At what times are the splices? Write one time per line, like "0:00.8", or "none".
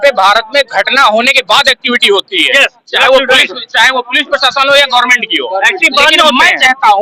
none